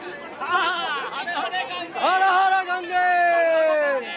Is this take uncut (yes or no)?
yes